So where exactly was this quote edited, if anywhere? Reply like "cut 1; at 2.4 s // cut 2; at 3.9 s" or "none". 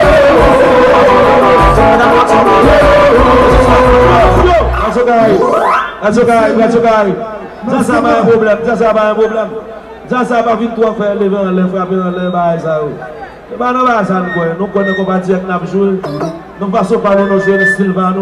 cut 1; at 4.6 s